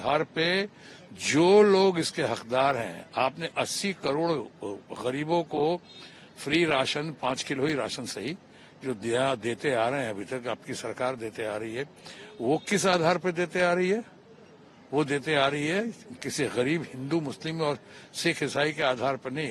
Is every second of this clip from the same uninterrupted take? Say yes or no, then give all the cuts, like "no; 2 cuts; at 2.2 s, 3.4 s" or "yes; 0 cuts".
yes; 0 cuts